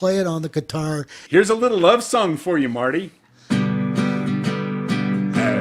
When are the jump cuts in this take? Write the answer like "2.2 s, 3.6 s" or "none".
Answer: 1.1 s